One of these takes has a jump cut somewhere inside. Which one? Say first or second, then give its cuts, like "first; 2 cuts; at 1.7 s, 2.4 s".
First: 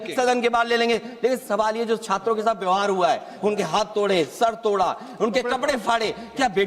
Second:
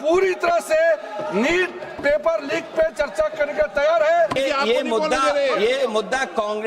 second; 1 cut; at 4.4 s